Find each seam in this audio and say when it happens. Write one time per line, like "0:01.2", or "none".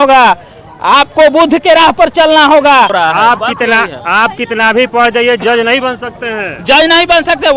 0:02.9